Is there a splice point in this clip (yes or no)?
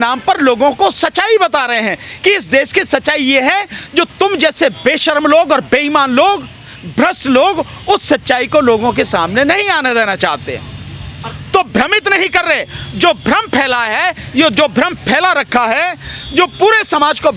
no